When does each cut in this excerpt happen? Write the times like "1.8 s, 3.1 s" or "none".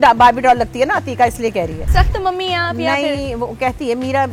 1.8 s